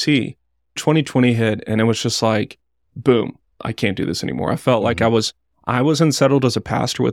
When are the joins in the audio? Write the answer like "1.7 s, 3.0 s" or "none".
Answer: 0.8 s, 3.6 s